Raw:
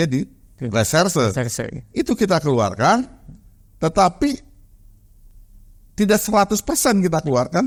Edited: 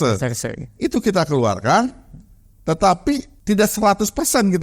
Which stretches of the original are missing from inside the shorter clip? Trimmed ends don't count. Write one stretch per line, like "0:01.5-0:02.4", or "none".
0:04.5-0:05.8